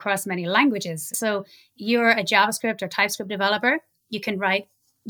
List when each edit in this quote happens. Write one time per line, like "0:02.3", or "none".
0:01.1